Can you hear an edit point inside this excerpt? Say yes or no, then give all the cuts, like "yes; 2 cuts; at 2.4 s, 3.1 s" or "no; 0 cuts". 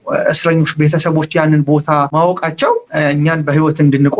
yes; 2 cuts; at 2.1 s, 2.9 s